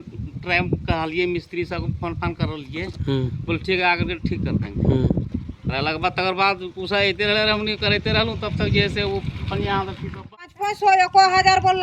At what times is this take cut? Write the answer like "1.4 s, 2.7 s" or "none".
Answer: 10.3 s